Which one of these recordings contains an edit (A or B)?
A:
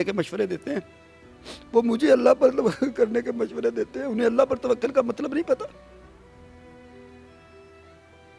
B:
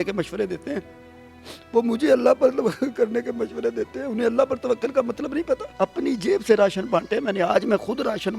B